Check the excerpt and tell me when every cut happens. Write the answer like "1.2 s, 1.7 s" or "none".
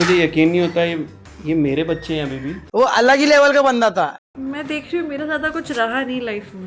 4.2 s